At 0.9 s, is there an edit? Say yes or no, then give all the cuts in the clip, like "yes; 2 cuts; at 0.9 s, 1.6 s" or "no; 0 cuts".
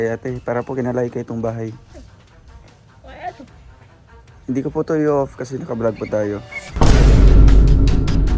no; 1 cut; at 6.6 s